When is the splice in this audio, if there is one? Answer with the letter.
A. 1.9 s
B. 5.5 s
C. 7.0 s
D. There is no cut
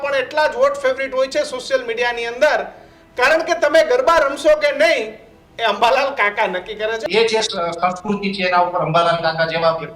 C